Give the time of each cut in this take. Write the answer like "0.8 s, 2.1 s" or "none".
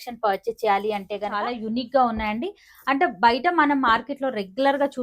1.5 s